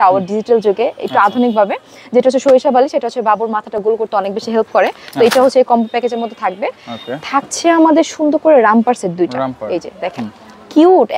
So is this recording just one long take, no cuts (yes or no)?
yes